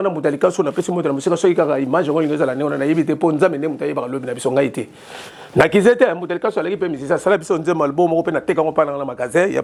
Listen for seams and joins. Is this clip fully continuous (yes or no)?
yes